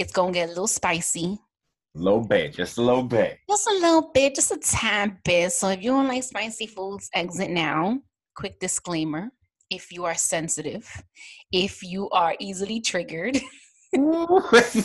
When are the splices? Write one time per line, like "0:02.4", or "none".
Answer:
none

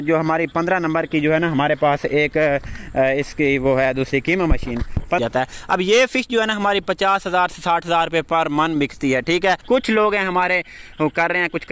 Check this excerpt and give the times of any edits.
0:05.2
0:09.6

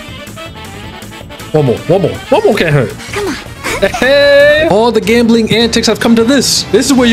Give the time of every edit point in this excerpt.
0:04.7

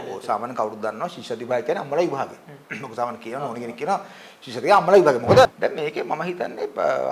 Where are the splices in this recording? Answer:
0:05.5

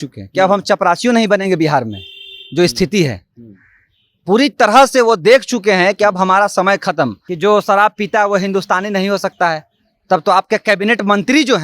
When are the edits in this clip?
0:07.2

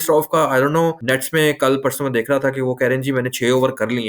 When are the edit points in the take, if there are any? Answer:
0:01.0

